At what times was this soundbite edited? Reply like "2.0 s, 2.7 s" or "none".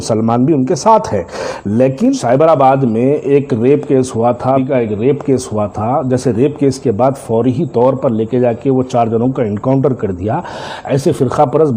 2.2 s, 4.6 s